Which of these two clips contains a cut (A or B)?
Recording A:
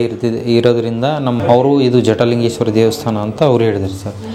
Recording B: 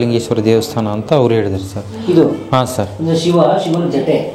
A